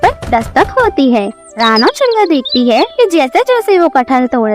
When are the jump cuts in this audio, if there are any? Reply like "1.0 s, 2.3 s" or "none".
1.5 s